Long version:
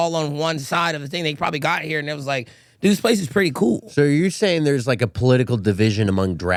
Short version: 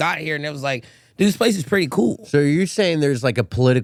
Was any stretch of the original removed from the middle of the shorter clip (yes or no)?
no